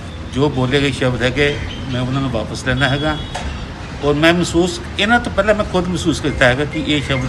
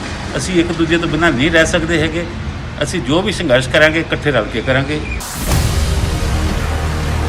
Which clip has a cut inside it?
second; 1 cut; at 5.2 s

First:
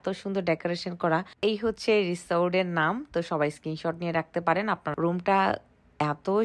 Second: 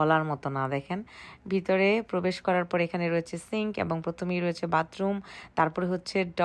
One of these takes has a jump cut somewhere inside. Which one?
first; 2 cuts; at 1.3 s, 4.8 s

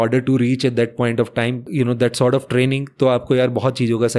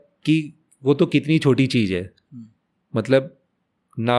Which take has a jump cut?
first; 1 cut; at 1.6 s

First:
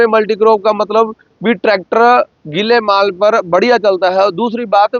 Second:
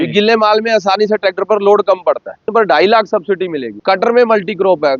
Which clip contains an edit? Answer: second; 2 cuts; at 2.5 s, 3.7 s

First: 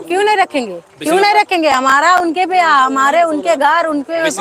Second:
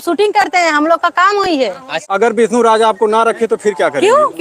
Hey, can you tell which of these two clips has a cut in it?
second; 1 cut; at 2.1 s

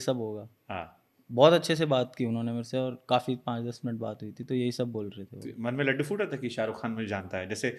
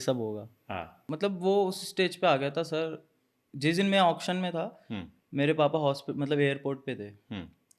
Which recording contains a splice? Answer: second; 1 cut; at 1.0 s

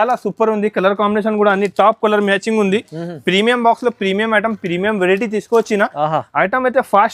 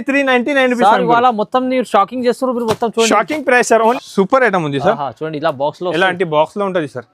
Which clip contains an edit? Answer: second; 1 cut; at 4.0 s

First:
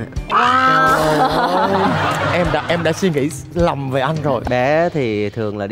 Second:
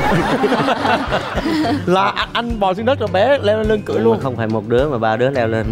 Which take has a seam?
first; 1 cut; at 4.5 s

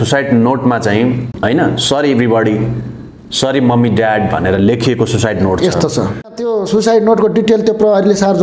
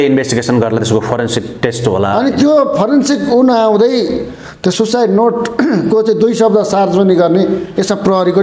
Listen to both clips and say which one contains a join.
first; 2 cuts; at 1.3 s, 6.4 s

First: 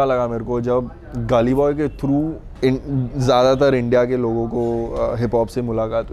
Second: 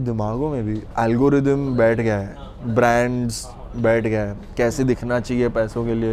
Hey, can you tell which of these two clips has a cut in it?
first; 1 cut; at 2.4 s

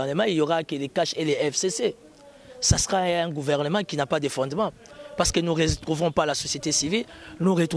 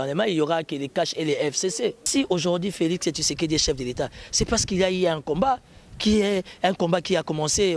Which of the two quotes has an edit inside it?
second; 1 cut; at 2.0 s

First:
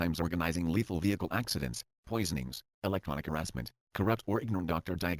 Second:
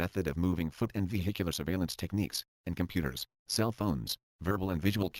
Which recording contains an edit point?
first; 1 cut; at 3.8 s

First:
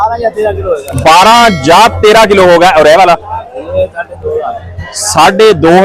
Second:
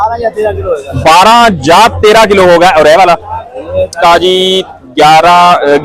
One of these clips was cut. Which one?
second; 1 cut; at 3.9 s

